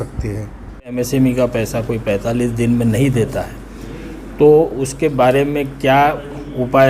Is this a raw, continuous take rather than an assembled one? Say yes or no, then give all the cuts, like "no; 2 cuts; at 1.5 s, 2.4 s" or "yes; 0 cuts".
no; 1 cut; at 1.0 s